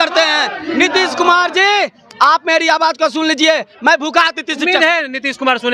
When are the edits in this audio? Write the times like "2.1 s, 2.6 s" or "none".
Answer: none